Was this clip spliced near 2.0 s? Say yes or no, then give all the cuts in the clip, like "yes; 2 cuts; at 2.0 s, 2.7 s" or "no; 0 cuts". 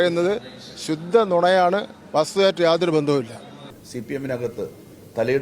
no; 1 cut; at 3.7 s